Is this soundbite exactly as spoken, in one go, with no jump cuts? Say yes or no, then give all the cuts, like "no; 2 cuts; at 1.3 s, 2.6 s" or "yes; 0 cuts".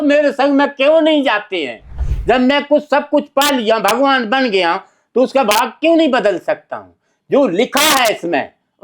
no; 1 cut; at 2.1 s